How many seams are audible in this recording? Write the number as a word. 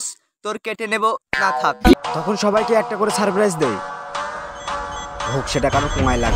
one